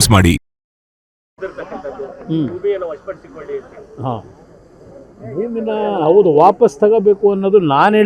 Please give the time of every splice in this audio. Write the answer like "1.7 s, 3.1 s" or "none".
1.2 s

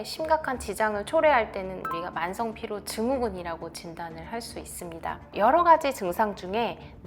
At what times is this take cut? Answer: 5.2 s

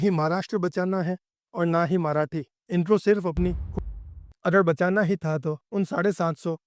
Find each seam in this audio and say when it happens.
3.8 s

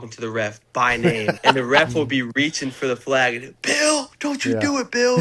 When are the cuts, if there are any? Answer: 1.4 s, 4.1 s

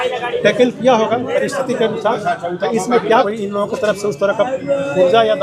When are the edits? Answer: 3.3 s

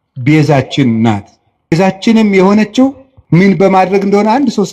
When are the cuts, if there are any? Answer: 1.7 s, 3.4 s

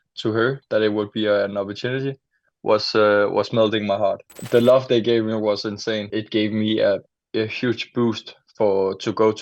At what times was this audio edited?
4.3 s, 6.1 s

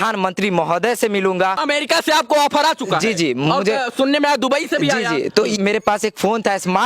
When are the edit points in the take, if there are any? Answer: 1.6 s, 5.6 s

